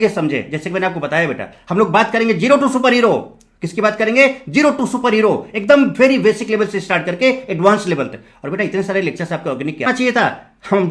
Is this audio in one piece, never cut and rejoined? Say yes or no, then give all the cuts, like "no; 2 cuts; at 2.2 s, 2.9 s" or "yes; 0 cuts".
no; 1 cut; at 9.9 s